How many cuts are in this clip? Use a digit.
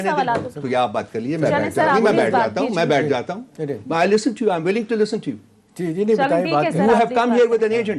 0